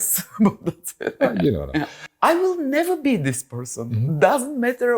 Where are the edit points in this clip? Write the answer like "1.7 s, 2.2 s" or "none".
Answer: 2.0 s